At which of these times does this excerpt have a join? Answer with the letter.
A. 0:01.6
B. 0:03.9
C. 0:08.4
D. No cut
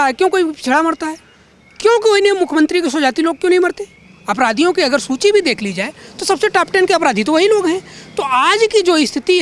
D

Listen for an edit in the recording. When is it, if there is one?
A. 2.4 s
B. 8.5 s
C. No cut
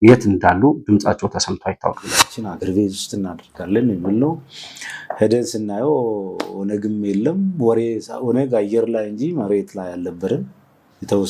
A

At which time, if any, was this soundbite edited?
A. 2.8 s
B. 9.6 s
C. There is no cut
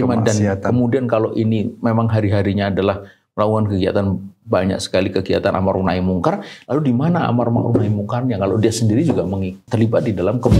B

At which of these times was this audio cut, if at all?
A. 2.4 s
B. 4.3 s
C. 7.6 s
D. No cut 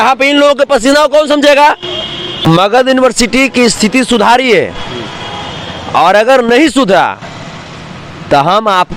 A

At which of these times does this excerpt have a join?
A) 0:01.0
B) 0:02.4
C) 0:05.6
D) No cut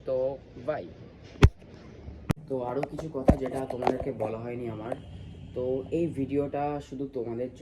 B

